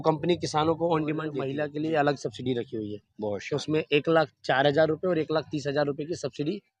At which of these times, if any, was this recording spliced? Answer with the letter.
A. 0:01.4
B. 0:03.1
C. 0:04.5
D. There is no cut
A